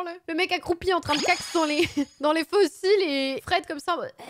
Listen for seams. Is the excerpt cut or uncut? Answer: cut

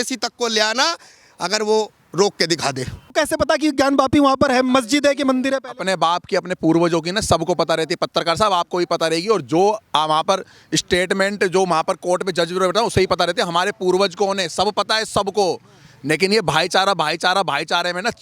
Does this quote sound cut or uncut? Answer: cut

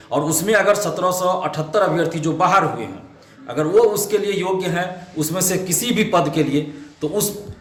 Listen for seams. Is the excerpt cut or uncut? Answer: uncut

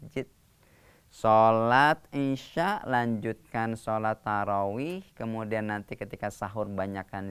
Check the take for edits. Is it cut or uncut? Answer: uncut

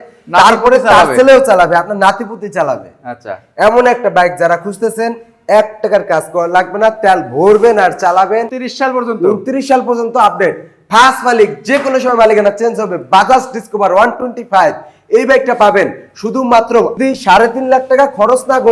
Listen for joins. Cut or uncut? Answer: cut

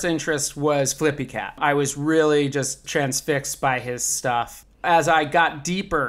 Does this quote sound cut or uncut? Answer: cut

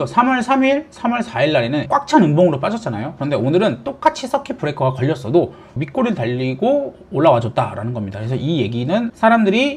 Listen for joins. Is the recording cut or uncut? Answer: cut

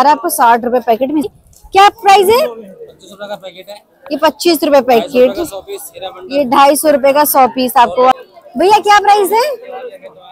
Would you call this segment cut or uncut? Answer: cut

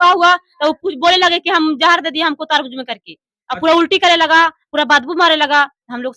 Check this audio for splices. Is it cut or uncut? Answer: uncut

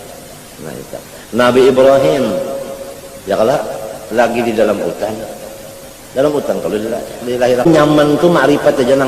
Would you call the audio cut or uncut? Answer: cut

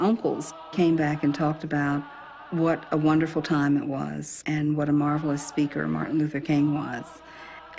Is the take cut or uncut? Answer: cut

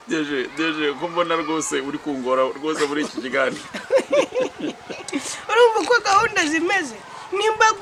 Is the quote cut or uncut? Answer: uncut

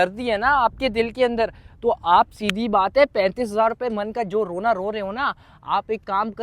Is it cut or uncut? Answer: uncut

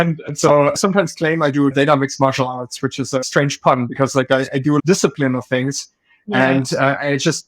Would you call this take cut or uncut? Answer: cut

